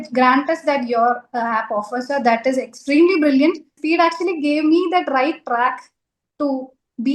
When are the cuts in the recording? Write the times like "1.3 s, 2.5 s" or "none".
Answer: 3.8 s